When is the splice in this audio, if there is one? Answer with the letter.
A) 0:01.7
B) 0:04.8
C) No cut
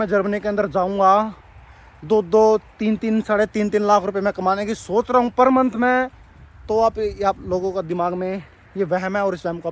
C